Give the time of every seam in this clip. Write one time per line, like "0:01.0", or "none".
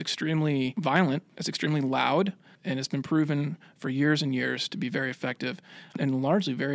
0:01.0
0:02.5
0:06.0